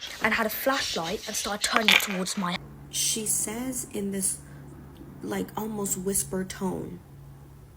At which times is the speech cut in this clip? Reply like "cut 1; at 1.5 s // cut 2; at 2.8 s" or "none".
cut 1; at 2.6 s